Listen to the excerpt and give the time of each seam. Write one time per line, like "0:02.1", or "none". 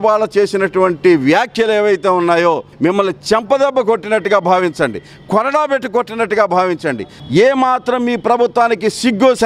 0:02.7
0:07.1